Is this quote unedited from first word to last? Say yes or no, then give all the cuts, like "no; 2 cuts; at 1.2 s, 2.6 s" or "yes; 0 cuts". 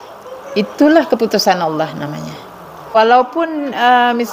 no; 1 cut; at 2.8 s